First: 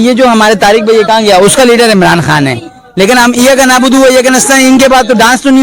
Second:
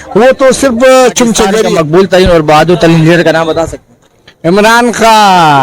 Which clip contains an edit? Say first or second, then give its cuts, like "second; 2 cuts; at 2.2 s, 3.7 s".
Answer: second; 1 cut; at 1.7 s